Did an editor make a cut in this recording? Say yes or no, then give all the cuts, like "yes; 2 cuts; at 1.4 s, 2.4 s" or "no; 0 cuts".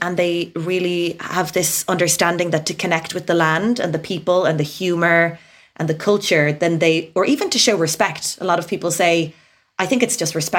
no; 0 cuts